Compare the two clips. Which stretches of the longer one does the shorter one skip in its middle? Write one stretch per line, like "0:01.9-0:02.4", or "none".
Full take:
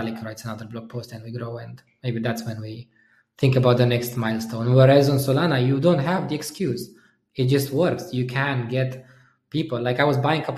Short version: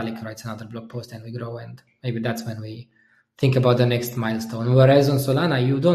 none